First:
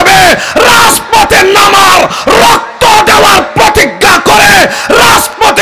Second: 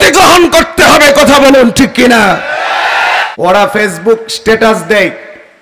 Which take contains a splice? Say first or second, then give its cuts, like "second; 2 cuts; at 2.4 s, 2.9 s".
second; 1 cut; at 3.3 s